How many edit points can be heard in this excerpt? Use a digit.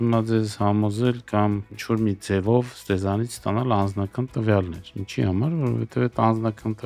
0